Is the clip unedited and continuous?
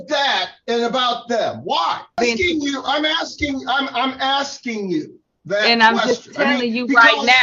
no; 1 cut; at 2.1 s

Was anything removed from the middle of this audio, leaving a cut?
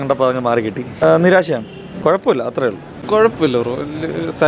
no; 0 cuts

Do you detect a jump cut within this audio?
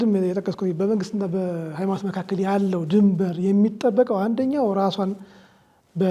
no; 0 cuts

